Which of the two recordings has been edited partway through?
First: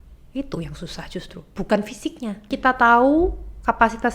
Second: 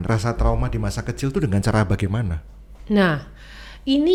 first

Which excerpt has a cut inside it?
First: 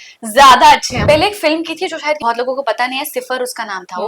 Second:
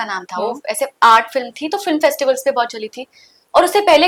first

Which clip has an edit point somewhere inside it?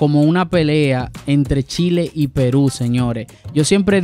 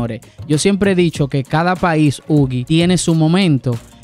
second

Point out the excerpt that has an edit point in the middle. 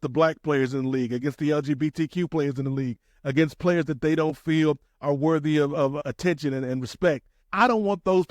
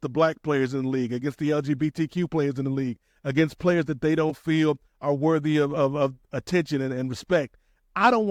first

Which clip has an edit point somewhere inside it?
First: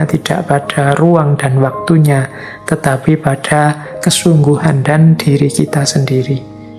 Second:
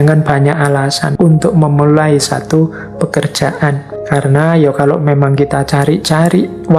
second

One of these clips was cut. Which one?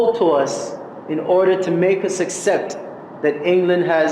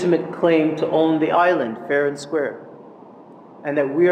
first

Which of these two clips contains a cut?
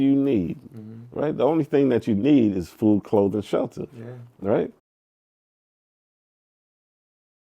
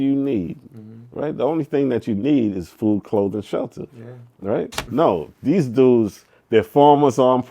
second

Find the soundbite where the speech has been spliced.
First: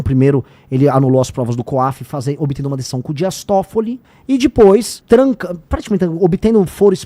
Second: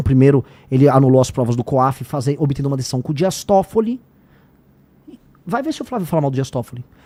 first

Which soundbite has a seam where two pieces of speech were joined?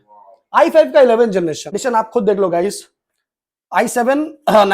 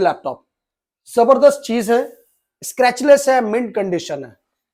first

